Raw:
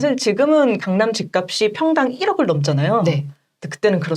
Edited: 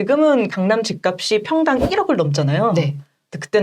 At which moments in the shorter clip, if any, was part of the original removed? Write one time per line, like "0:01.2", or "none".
none